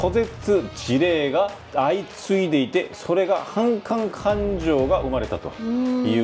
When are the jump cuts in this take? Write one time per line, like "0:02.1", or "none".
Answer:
none